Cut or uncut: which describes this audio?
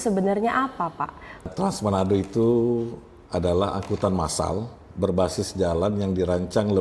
cut